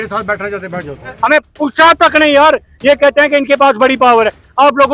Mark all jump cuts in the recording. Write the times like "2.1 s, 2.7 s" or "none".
1.2 s